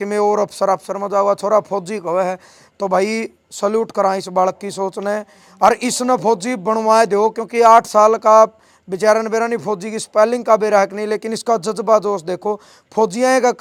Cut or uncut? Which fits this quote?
uncut